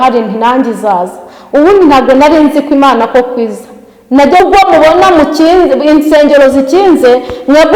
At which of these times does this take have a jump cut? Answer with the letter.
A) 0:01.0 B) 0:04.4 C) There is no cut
B